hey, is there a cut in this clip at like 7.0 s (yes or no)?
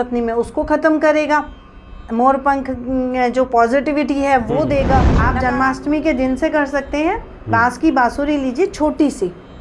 no